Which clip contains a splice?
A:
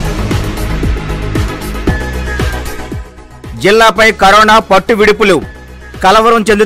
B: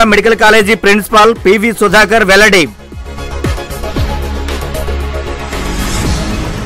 A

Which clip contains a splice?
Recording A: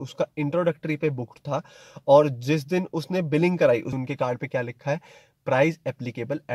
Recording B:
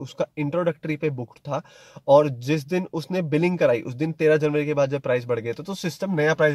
A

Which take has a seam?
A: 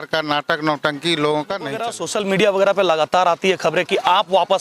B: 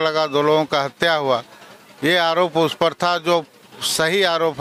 A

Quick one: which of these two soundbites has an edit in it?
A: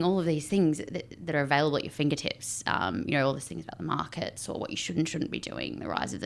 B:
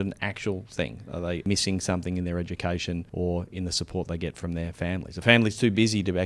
B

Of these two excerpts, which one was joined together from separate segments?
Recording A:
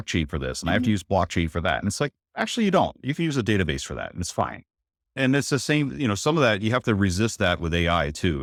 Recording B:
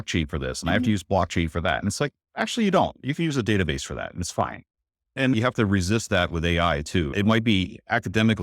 B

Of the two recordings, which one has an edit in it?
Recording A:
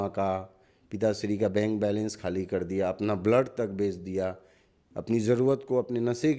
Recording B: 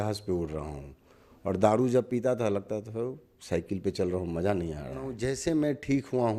B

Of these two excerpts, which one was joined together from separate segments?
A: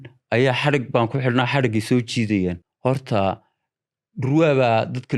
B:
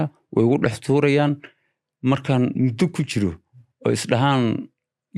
A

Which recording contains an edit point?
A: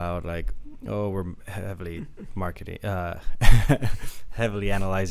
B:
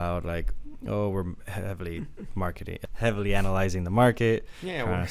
B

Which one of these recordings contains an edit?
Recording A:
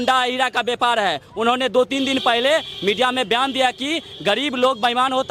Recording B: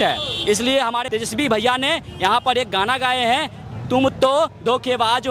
B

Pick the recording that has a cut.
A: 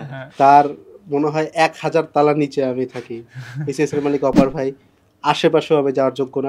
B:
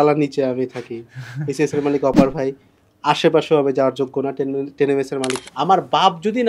B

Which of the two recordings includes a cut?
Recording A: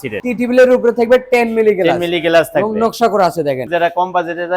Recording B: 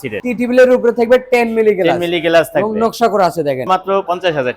A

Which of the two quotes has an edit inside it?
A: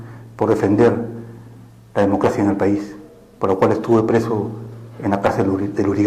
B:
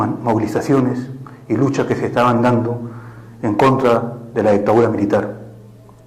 A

